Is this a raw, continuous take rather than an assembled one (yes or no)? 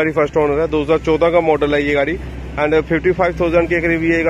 yes